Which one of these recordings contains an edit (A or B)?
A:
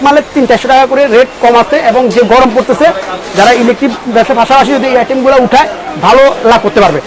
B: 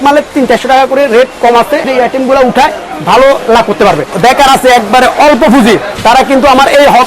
B